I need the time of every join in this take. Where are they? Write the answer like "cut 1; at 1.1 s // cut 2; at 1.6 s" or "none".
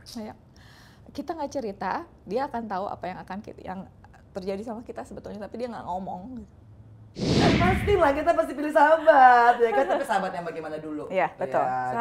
cut 1; at 7.3 s